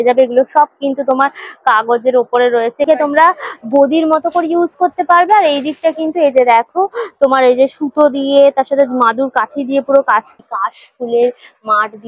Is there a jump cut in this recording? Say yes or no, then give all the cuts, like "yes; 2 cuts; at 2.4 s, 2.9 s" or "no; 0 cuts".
yes; 2 cuts; at 2.8 s, 10.3 s